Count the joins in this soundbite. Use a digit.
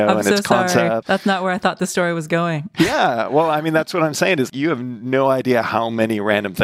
3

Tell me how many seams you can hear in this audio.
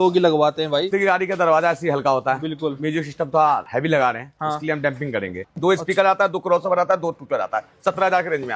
2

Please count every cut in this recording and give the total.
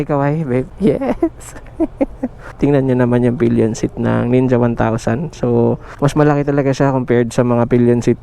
1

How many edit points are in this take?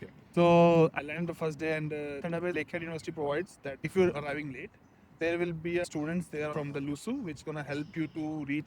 1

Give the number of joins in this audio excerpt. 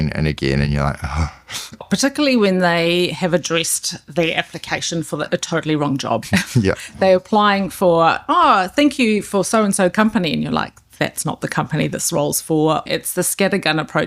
3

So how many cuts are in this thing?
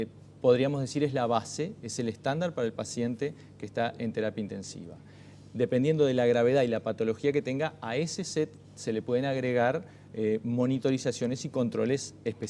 1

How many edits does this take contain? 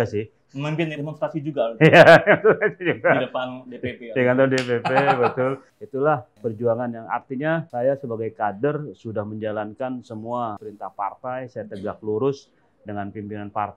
0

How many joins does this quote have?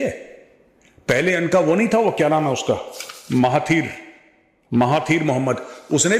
0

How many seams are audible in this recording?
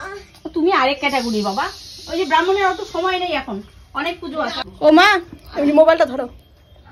1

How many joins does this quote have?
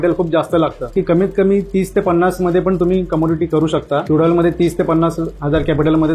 2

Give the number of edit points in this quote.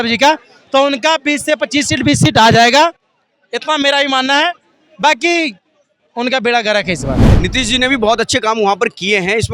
1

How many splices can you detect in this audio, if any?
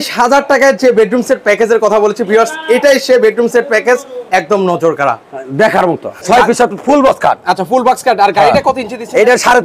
1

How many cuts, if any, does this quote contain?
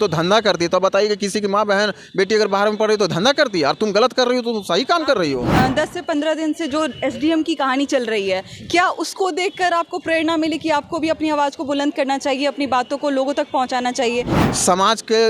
2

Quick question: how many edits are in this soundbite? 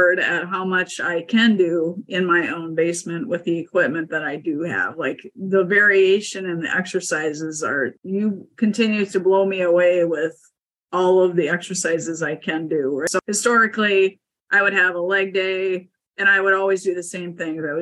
2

